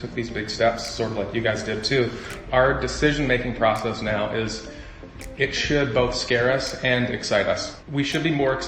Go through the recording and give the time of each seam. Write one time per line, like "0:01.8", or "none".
0:02.3
0:07.7